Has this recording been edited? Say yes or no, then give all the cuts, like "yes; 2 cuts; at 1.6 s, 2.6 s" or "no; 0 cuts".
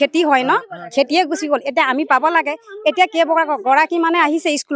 no; 0 cuts